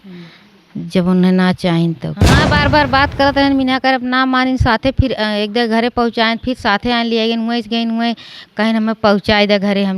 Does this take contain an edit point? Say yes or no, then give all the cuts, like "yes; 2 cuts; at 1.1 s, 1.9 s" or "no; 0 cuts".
yes; 1 cut; at 2.3 s